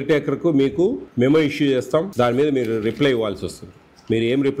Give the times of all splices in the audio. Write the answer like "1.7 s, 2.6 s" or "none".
1.0 s, 2.1 s